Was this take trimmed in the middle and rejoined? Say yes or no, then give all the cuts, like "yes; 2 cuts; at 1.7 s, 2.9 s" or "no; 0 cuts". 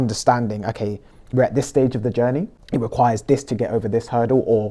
yes; 1 cut; at 2.6 s